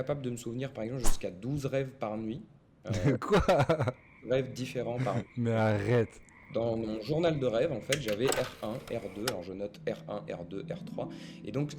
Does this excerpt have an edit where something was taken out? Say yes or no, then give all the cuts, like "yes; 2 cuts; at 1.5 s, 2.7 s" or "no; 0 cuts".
no; 0 cuts